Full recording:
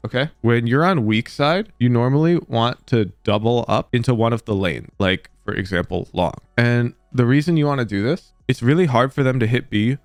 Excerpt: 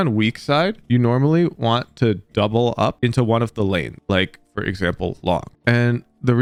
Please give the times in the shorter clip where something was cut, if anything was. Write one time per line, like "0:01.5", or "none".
none